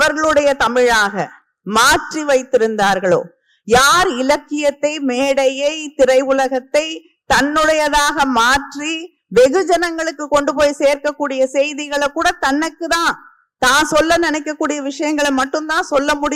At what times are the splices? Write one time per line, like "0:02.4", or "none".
none

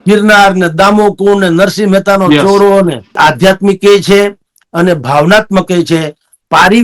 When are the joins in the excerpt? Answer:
0:03.2

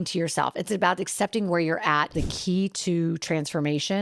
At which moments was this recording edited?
0:02.2

